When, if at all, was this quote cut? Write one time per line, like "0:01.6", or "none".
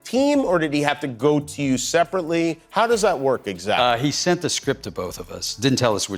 none